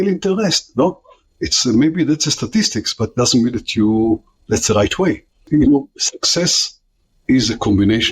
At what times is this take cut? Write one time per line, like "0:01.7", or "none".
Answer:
0:05.4